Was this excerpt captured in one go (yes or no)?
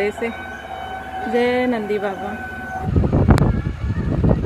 no